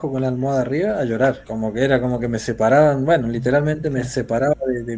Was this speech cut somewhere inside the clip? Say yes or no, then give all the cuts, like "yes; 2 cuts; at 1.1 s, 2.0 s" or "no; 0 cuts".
yes; 1 cut; at 1.5 s